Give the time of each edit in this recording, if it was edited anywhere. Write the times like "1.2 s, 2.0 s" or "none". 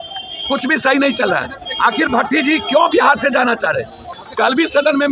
4.1 s